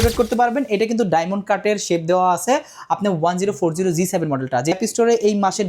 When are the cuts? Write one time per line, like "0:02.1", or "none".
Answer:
0:04.8